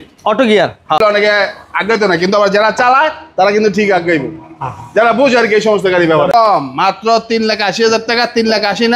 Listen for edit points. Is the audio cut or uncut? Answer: cut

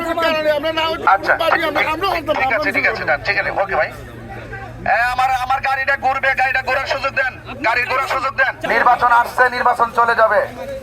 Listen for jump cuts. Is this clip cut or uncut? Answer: cut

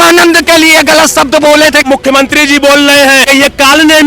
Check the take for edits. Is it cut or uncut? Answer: cut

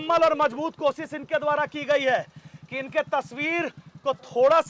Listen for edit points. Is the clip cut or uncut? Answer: uncut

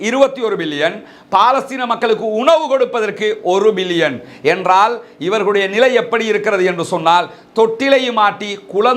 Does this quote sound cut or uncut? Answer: uncut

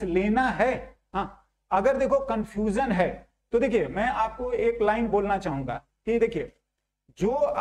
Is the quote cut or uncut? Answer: uncut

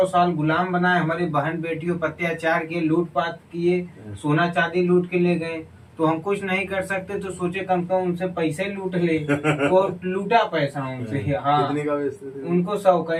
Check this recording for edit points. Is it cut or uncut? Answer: uncut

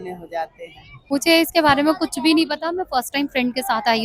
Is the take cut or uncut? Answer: cut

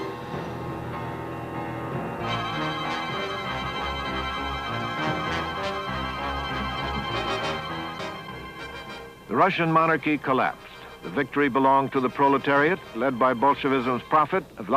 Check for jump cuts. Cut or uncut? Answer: uncut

